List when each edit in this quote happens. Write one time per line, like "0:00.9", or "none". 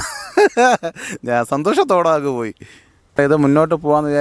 0:03.2